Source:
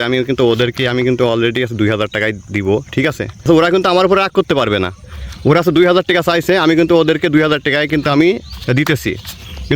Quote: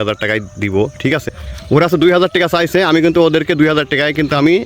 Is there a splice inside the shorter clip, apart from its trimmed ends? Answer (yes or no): yes